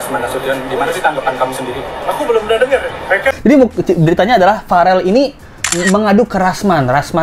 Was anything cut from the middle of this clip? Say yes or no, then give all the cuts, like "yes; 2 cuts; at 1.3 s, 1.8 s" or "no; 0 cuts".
yes; 1 cut; at 3.3 s